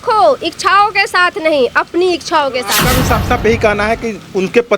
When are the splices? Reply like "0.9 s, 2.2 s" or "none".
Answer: 2.8 s

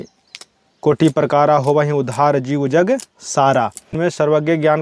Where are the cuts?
3.8 s

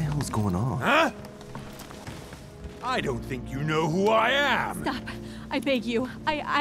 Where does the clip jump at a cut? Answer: none

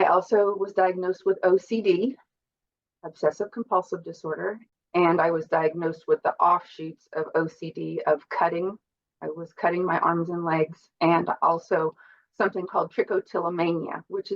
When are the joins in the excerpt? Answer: 4.6 s

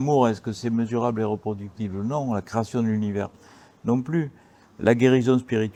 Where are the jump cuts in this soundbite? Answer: none

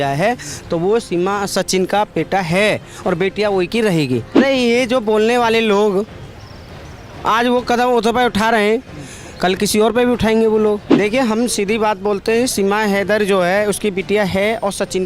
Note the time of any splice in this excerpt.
4.4 s, 10.9 s

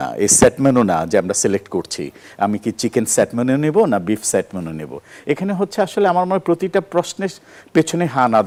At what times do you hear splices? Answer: none

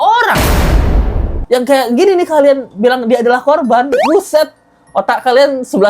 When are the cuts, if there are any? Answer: 1.4 s

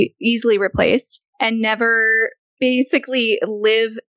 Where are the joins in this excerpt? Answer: 1.2 s

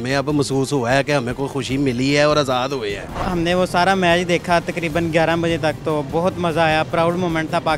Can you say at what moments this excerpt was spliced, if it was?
3.3 s

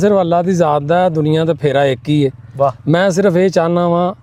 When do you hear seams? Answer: none

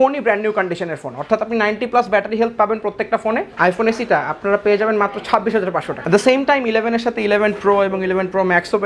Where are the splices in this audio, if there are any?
3.5 s, 6.0 s

